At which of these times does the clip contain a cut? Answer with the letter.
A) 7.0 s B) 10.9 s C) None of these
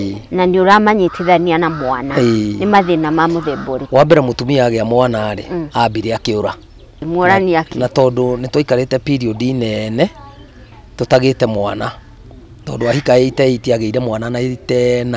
A